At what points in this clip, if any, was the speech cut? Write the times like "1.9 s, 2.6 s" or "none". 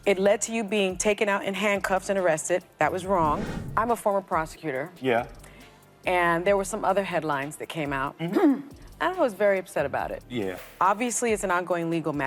none